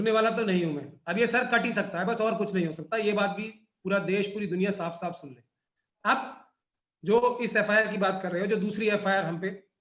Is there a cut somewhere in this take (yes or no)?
no